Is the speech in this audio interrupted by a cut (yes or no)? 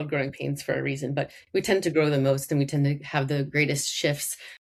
no